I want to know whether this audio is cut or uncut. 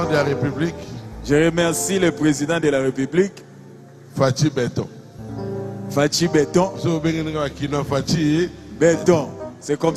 uncut